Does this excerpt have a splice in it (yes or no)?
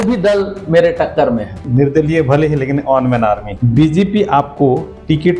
yes